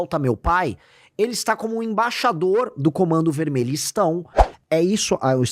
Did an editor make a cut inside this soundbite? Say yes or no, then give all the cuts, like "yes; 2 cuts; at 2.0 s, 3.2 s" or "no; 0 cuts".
yes; 1 cut; at 4.4 s